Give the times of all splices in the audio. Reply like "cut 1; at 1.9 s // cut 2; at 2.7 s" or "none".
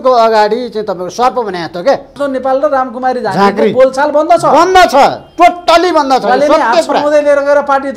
cut 1; at 2.1 s